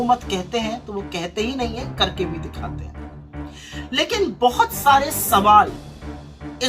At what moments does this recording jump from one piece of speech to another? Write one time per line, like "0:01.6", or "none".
0:02.3
0:03.7

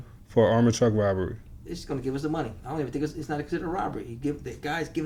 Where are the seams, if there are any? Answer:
none

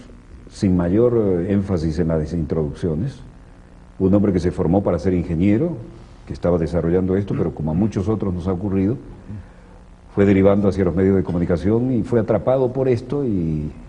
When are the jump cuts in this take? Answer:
0:08.1

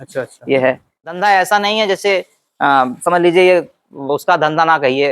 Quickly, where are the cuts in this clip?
0:01.0

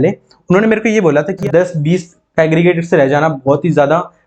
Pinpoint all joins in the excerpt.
0:01.4

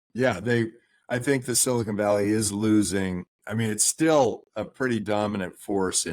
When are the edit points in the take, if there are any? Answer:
none

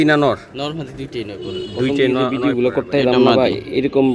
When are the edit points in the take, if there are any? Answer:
0:02.3

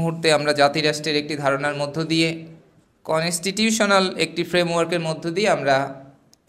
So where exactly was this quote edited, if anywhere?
none

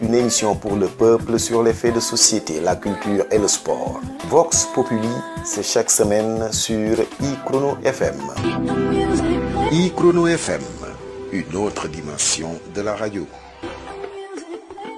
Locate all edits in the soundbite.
0:08.4

